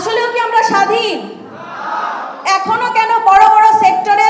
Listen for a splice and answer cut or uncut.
cut